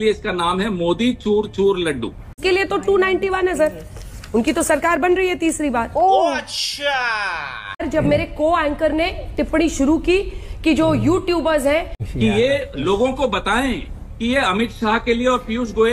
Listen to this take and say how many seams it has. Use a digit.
3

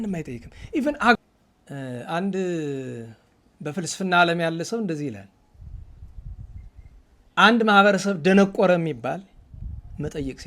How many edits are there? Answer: 1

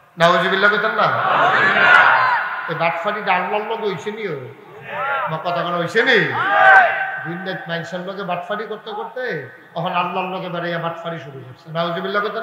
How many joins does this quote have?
0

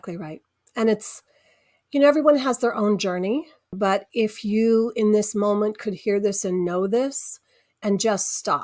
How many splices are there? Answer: 1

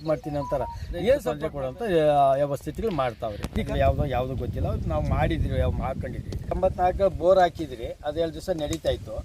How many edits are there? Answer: 2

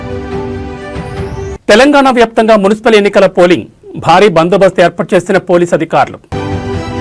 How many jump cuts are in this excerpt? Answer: 1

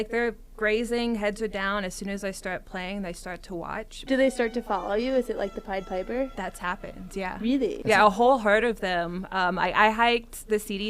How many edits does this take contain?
2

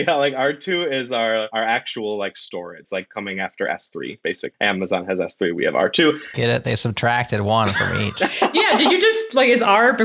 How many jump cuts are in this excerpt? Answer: 3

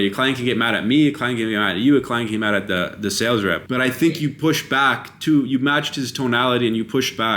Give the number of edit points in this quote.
1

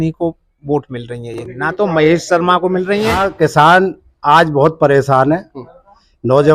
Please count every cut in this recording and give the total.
1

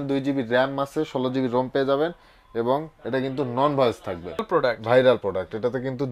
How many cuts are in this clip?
1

